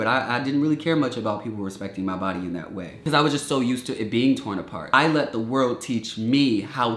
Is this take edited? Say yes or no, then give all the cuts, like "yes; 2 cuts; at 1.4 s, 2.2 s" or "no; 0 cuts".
yes; 2 cuts; at 3.0 s, 4.9 s